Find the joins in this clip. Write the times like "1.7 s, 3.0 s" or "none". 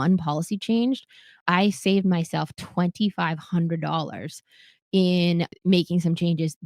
1.4 s, 5.5 s